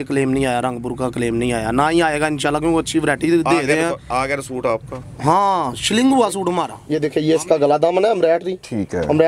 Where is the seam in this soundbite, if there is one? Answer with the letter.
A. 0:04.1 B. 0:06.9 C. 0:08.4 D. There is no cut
B